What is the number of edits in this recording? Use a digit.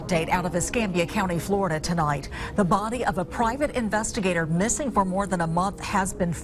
0